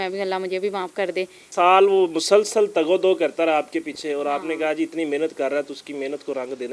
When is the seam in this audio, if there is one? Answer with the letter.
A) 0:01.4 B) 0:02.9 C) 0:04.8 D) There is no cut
A